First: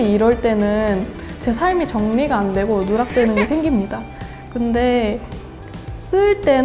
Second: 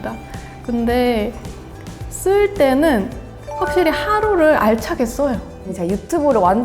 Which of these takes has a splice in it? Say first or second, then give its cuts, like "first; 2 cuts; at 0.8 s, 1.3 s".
second; 1 cut; at 5.5 s